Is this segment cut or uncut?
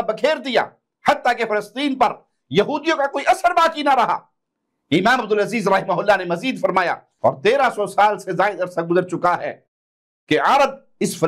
cut